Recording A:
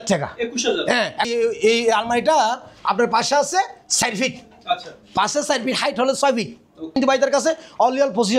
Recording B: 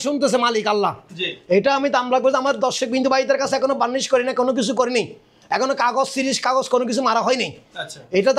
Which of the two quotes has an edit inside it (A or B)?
A